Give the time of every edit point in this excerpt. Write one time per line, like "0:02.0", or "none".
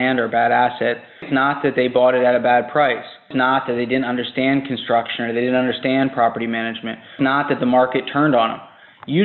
0:01.3
0:03.3
0:07.2